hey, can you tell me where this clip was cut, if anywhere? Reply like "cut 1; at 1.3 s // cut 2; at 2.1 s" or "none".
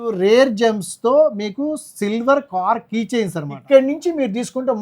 cut 1; at 3.5 s